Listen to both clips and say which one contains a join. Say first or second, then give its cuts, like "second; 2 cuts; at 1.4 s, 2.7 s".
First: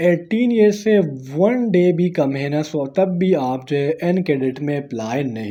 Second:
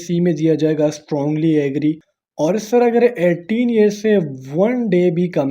second; 1 cut; at 2.0 s